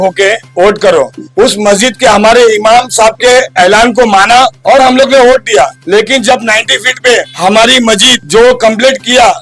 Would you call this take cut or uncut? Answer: cut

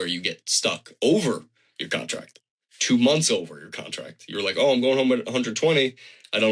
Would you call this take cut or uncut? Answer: uncut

